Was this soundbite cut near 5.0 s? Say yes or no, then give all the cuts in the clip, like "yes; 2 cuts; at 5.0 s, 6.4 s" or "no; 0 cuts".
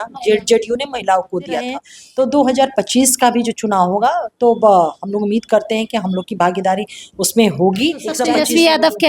no; 2 cuts; at 2.0 s, 8.2 s